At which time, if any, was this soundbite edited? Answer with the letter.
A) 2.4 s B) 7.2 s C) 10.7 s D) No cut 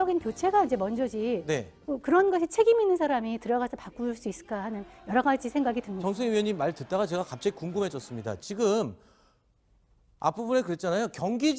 C